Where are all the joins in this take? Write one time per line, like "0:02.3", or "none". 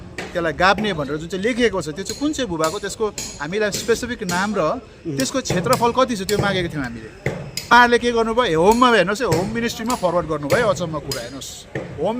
0:07.7